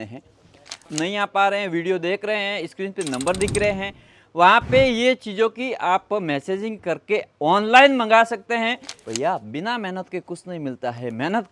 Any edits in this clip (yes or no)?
yes